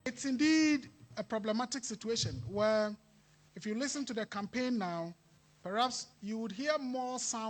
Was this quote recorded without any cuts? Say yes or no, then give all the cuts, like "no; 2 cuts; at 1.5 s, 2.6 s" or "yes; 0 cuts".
yes; 0 cuts